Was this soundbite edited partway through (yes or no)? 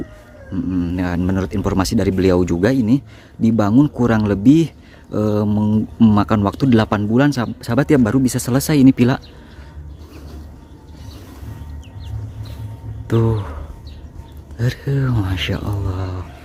no